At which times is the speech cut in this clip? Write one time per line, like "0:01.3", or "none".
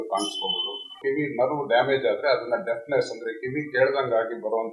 0:01.0